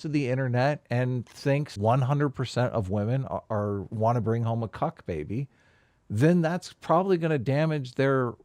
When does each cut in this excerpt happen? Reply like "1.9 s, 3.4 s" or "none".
1.7 s